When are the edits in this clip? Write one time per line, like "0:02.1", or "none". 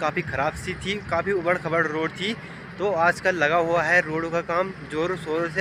none

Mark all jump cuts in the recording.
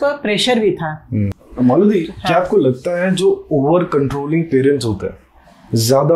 0:01.4

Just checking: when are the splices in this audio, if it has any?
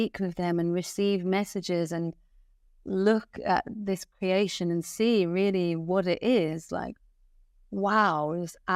none

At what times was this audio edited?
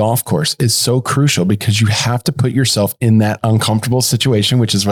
none

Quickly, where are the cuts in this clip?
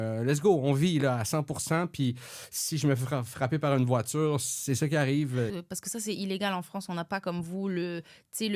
0:05.6

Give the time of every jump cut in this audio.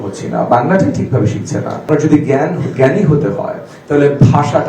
0:01.9

